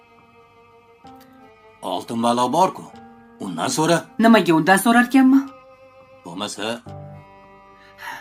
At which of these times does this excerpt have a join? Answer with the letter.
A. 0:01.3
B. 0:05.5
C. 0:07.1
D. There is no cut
A